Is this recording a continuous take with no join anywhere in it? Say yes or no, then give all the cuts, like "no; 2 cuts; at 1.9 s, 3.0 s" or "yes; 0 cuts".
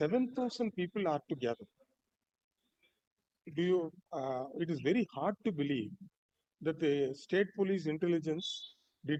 yes; 0 cuts